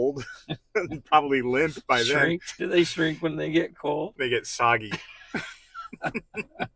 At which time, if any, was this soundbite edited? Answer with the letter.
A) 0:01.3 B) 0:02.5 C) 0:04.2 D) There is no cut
B